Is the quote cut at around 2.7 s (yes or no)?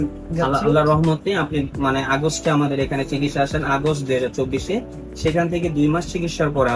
no